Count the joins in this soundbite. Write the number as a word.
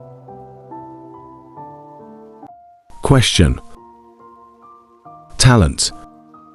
one